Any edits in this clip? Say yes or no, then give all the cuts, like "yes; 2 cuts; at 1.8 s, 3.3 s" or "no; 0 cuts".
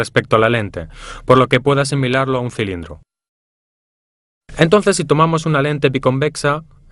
no; 0 cuts